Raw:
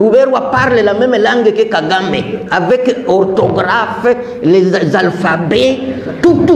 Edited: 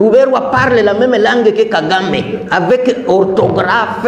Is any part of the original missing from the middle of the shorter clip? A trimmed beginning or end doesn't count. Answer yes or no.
no